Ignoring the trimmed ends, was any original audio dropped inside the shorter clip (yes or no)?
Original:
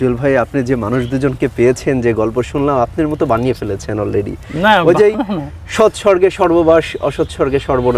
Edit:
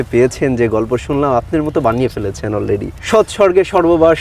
yes